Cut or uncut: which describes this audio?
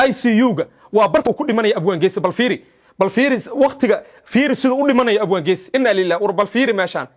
cut